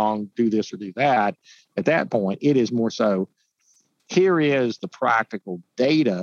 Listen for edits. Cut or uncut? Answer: uncut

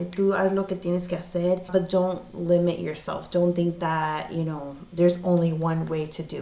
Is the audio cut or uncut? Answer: cut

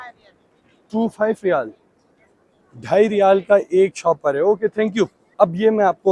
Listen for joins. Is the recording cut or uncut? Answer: uncut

